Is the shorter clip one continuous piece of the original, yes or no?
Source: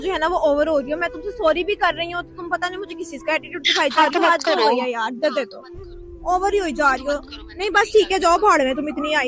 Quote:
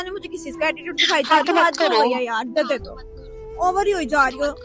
yes